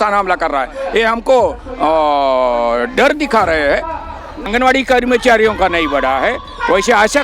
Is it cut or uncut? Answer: cut